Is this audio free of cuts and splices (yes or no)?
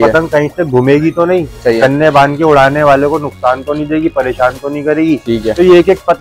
yes